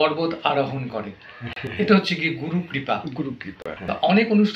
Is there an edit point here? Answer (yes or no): no